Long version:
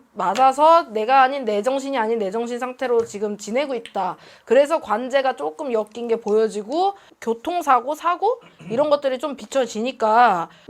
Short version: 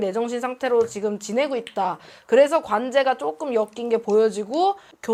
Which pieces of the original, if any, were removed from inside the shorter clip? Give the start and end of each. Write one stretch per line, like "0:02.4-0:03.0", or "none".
none